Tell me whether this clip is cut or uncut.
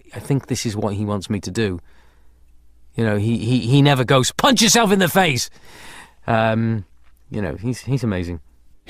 cut